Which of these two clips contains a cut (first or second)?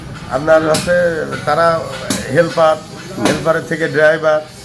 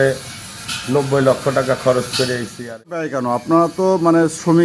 second